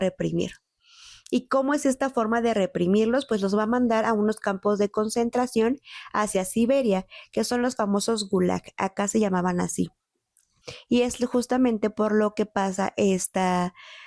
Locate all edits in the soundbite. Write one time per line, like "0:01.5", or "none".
0:10.5